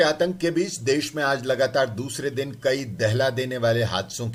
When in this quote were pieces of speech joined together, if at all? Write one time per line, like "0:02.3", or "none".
none

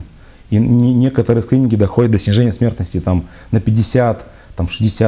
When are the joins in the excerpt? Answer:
none

